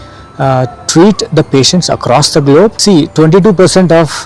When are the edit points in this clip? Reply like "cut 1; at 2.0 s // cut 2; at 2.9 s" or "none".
cut 1; at 2.8 s